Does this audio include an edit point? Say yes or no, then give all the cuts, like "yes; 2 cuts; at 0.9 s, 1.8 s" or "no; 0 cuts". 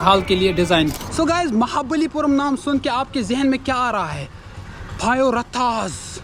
yes; 1 cut; at 0.9 s